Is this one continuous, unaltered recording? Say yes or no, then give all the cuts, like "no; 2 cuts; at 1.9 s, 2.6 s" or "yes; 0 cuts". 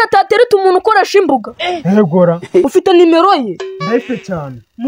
no; 1 cut; at 2.6 s